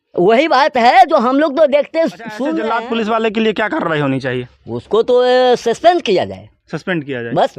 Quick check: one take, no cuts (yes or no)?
no